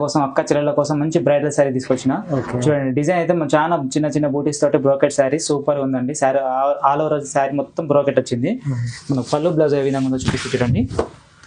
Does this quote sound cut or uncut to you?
uncut